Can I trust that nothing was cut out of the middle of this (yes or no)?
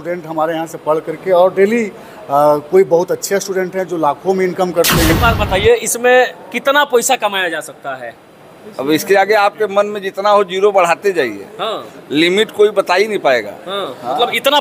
no